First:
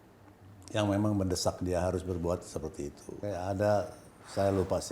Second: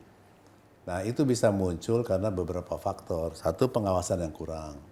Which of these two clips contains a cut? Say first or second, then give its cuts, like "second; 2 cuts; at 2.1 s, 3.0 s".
first; 1 cut; at 3.2 s